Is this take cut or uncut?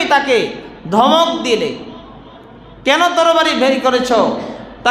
uncut